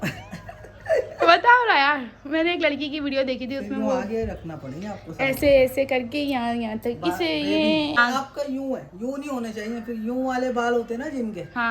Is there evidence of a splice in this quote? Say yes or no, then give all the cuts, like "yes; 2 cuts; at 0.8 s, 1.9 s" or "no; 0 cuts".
yes; 1 cut; at 8.0 s